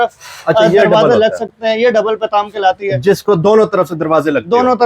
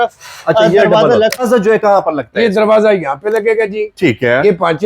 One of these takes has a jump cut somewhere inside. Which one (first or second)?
second